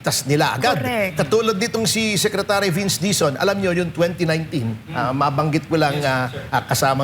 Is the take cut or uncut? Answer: uncut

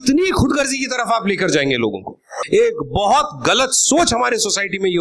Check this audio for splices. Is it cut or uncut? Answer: cut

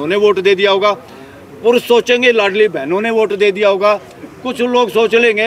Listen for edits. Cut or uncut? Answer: uncut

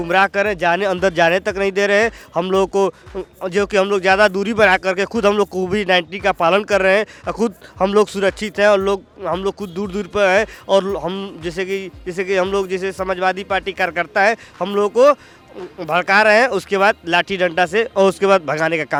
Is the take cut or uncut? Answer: uncut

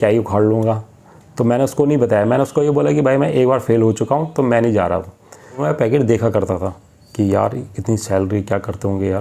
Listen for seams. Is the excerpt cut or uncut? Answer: cut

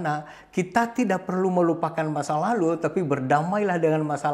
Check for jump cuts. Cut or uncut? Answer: uncut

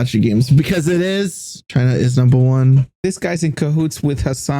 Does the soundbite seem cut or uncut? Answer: cut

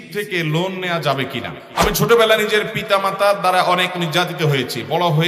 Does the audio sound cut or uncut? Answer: cut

